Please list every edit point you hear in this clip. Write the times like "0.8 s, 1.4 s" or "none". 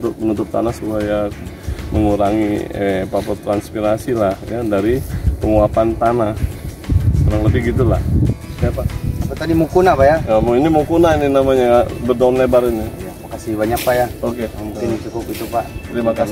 none